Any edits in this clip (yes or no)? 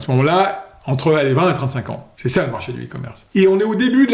yes